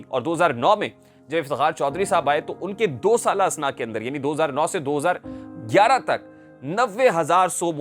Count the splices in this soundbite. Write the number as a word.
zero